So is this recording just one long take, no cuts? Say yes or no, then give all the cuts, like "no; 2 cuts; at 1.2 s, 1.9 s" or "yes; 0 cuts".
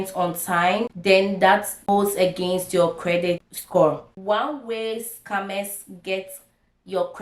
no; 4 cuts; at 0.9 s, 1.9 s, 3.5 s, 4.1 s